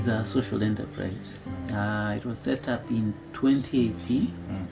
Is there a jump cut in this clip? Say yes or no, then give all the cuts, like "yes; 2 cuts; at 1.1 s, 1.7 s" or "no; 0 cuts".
no; 0 cuts